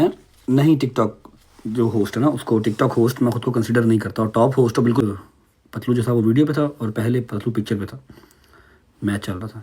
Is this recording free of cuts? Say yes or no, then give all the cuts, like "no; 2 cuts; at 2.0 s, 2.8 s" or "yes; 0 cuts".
no; 1 cut; at 5.0 s